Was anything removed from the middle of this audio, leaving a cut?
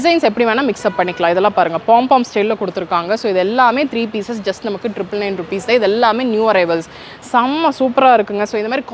no; 0 cuts

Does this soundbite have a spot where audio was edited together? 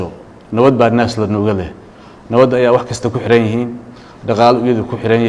no; 0 cuts

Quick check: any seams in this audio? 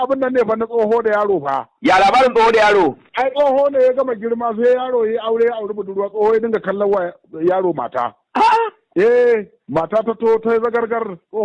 no; 0 cuts

